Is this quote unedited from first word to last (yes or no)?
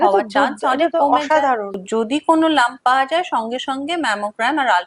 no